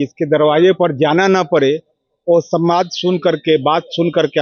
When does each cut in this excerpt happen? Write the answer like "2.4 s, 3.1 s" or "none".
none